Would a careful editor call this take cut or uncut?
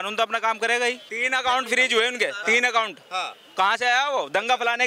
cut